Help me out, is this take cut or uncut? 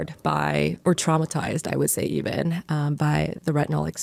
uncut